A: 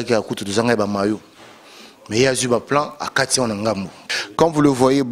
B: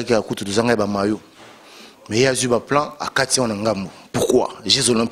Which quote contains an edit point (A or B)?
A